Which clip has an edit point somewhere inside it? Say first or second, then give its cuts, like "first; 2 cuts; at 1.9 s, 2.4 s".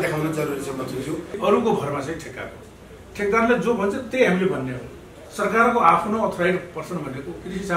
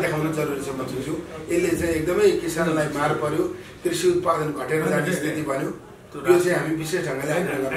first; 1 cut; at 1.4 s